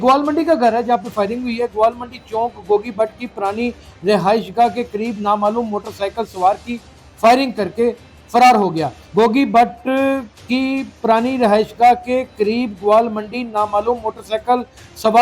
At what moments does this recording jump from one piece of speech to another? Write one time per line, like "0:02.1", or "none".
0:09.0